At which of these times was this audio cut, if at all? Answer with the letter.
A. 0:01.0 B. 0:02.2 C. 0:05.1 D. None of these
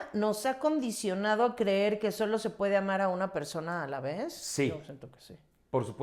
D